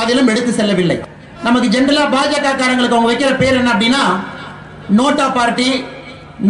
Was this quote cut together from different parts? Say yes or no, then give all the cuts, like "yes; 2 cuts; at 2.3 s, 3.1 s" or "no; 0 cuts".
yes; 1 cut; at 1.0 s